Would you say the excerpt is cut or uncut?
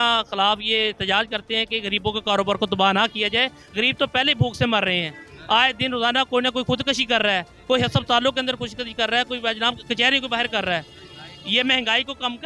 uncut